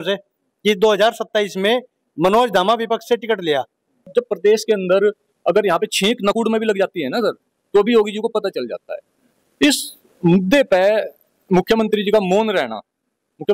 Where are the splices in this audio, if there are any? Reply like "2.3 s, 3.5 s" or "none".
4.1 s